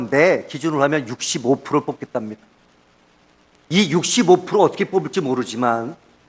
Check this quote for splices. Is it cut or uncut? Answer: cut